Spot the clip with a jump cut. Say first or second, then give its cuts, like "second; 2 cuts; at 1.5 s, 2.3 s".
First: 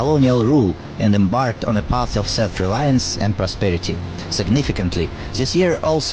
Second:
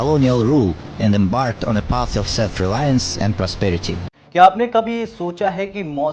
second; 1 cut; at 4.2 s